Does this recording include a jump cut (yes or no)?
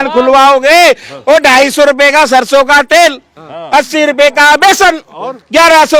no